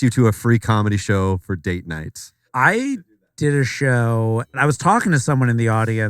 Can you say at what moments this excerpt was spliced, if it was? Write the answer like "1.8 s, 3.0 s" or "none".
2.4 s